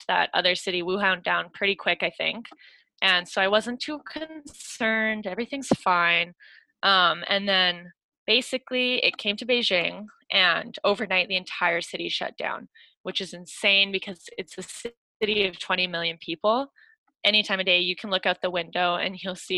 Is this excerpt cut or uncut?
uncut